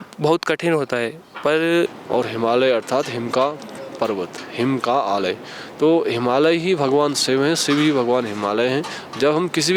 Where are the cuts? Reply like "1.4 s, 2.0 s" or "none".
2.0 s

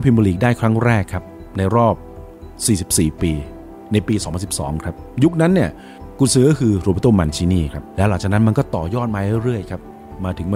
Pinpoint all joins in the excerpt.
none

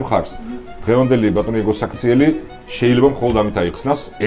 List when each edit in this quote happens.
none

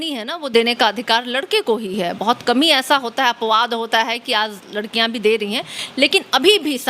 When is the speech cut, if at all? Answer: none

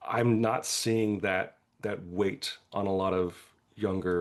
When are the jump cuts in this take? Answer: none

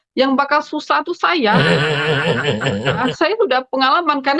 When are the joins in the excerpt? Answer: 1.6 s, 3.0 s

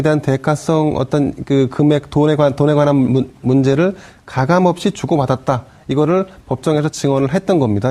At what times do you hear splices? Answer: 5.3 s

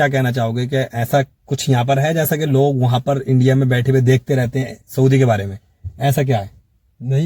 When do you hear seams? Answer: none

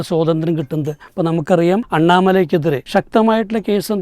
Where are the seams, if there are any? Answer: 1.9 s, 2.8 s

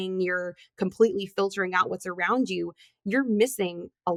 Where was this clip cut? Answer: none

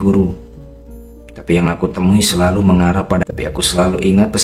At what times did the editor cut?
3.3 s

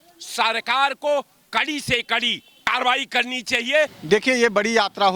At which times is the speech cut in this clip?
2.7 s, 4.0 s

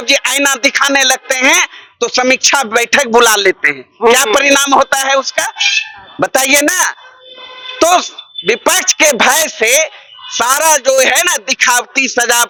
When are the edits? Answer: none

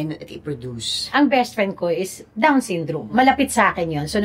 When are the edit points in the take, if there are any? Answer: 1.0 s, 3.1 s

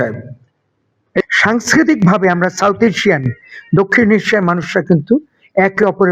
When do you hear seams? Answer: 1.2 s

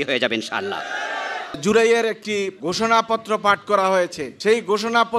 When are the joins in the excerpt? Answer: 1.6 s, 2.6 s, 4.2 s

